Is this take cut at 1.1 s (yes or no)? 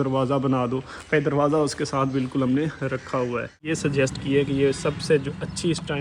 no